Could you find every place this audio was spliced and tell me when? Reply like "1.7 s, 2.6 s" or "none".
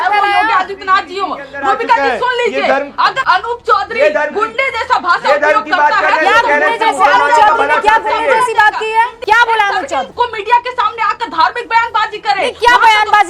3.2 s, 9.2 s, 10.1 s